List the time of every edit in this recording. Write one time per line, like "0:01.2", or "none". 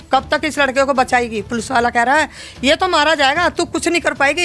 none